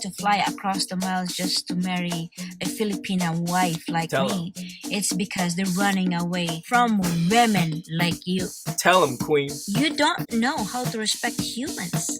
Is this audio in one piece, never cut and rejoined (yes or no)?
yes